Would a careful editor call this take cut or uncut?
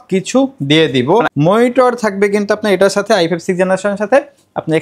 cut